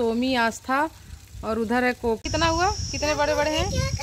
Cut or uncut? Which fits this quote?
cut